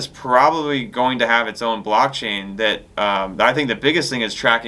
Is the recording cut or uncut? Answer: uncut